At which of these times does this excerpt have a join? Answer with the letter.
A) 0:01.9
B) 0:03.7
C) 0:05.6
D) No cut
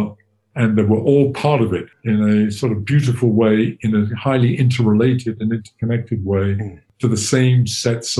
A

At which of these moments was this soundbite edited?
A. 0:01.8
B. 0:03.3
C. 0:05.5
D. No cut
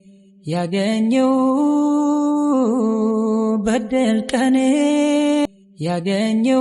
C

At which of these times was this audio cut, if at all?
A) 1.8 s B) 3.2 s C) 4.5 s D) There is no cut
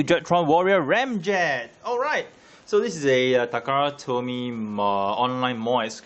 D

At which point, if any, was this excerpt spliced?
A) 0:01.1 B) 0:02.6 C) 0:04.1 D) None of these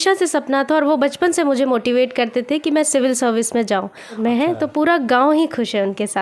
C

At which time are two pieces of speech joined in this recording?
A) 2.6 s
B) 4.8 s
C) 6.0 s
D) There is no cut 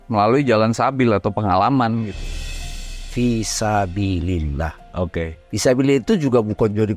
A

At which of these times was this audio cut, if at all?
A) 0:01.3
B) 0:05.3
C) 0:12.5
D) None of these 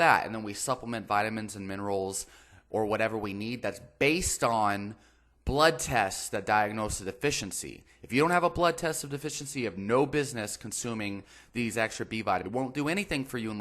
C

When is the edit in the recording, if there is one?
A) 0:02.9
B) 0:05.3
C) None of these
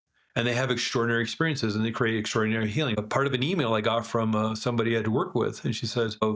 A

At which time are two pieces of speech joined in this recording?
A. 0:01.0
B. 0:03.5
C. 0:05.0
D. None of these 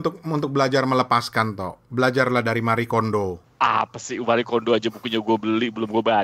D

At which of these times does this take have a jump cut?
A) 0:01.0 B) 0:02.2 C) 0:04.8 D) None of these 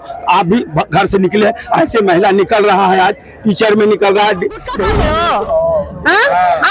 C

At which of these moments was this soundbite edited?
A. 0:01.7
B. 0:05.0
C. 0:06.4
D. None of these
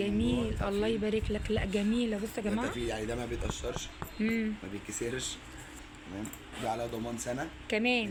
D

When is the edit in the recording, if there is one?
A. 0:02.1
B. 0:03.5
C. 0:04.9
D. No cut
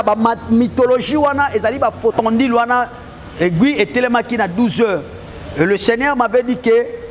A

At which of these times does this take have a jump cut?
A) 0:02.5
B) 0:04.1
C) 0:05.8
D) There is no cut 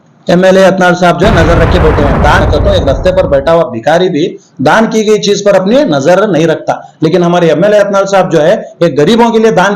A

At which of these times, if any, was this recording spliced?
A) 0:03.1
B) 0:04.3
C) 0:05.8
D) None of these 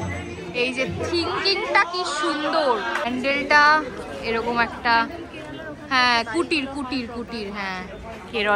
A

